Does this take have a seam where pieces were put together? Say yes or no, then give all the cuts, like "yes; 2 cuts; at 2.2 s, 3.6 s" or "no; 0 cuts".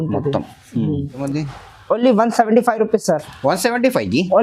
yes; 1 cut; at 1.2 s